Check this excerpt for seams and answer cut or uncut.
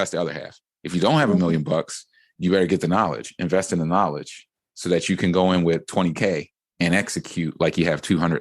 cut